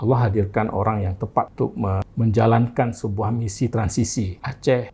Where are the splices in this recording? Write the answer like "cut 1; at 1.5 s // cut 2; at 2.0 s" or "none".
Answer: none